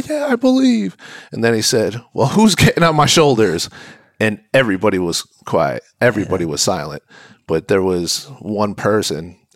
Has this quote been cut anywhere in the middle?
no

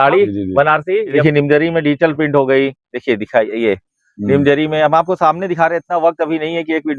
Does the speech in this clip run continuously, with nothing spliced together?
no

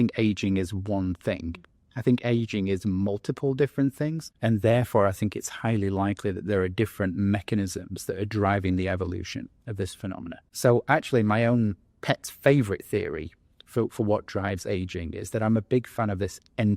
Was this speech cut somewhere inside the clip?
yes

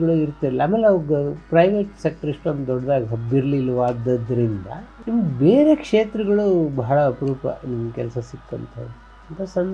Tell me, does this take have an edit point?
no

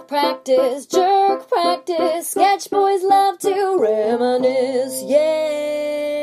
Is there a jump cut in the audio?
no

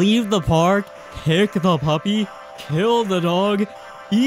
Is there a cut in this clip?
no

